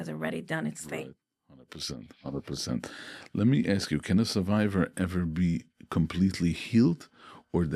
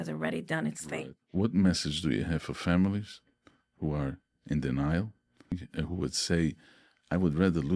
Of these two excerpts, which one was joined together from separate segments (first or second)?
second